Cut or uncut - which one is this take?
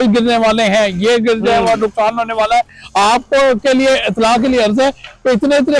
uncut